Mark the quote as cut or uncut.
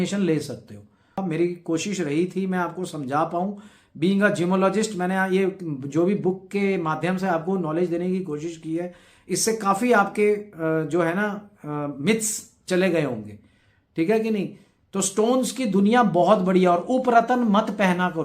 cut